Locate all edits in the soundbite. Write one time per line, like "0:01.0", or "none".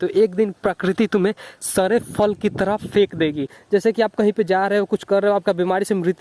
0:03.6